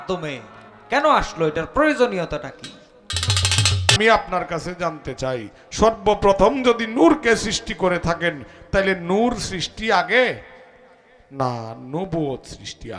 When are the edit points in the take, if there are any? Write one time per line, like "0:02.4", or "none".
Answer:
0:04.0

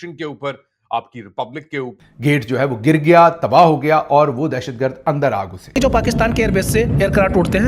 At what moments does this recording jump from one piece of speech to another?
0:01.9
0:05.8

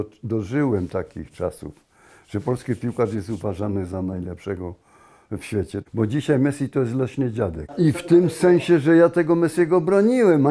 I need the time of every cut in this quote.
0:05.8
0:07.7

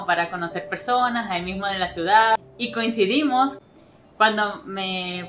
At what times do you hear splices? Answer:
0:02.5
0:03.6

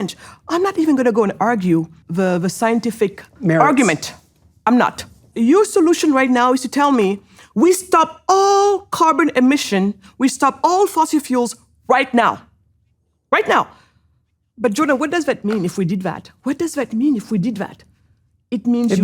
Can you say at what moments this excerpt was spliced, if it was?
0:02.0
0:03.3
0:05.3

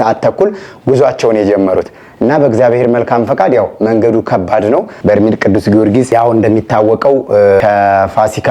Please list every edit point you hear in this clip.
0:04.9

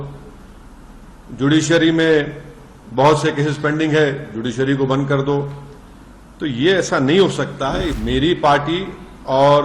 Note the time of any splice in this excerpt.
0:08.0

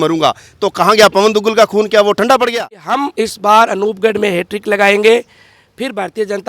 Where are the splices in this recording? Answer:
0:02.7

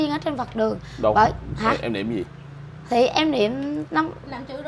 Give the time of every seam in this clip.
none

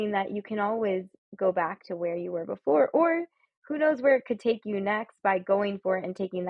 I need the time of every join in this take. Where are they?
none

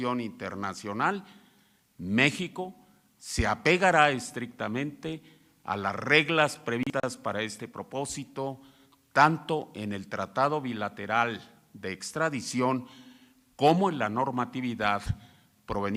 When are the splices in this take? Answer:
none

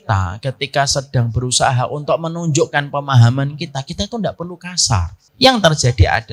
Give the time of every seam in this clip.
0:05.2

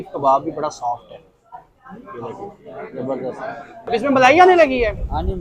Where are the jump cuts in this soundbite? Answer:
0:03.8

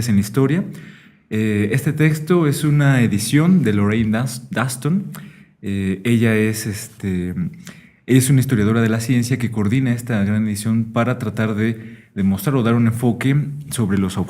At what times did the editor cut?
0:10.5

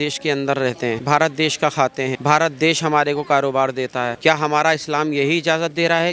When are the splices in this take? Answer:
0:01.0
0:02.2
0:04.1

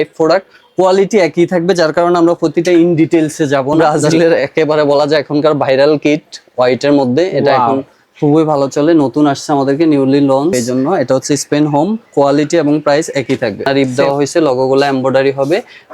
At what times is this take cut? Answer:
0:03.8
0:10.5
0:13.7

